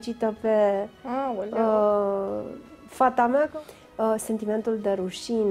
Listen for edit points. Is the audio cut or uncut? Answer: cut